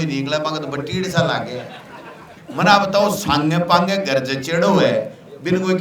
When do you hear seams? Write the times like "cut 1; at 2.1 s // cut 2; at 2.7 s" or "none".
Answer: cut 1; at 2.4 s